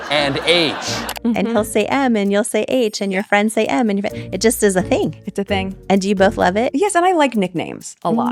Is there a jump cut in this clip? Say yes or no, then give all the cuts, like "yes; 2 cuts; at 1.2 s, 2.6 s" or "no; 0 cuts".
no; 0 cuts